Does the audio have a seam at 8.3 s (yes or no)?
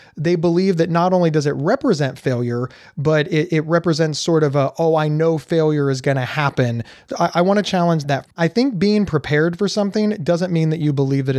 yes